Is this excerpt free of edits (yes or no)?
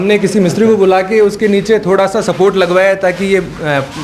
yes